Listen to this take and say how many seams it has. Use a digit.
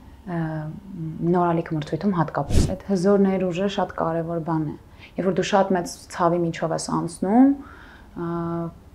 1